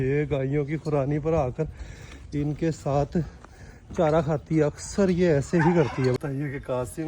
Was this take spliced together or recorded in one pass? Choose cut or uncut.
cut